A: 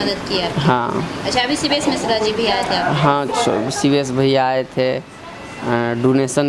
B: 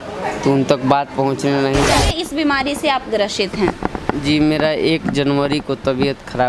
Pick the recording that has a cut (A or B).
B